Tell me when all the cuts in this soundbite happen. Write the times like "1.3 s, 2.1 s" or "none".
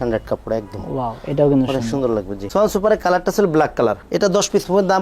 2.4 s